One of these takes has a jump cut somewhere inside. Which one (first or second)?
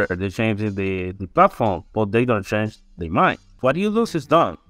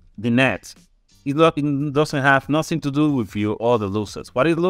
first